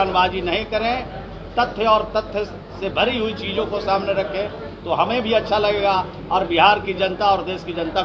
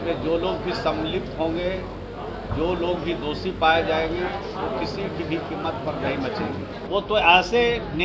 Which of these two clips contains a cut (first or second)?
second